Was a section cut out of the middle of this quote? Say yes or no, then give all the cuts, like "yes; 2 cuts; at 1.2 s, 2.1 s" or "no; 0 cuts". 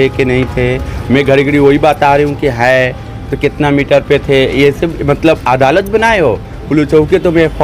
no; 0 cuts